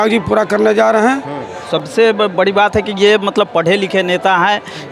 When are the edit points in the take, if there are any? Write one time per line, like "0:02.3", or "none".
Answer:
0:01.7

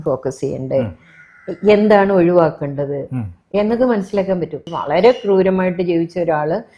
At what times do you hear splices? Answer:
0:04.7

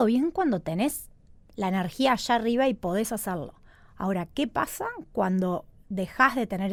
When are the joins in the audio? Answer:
none

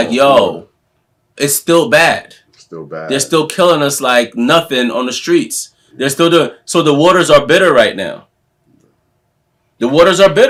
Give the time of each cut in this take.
none

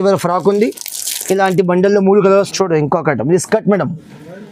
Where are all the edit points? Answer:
0:02.3

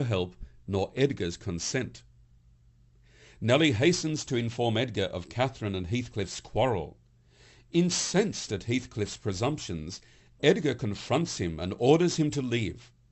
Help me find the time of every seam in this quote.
none

